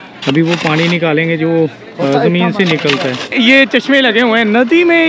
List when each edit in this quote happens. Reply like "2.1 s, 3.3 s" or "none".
3.3 s